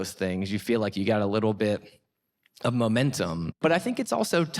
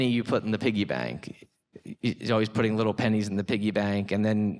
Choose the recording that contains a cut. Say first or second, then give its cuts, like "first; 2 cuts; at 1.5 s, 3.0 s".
first; 1 cut; at 3.6 s